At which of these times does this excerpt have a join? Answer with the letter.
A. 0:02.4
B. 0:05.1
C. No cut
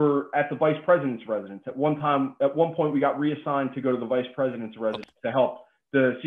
B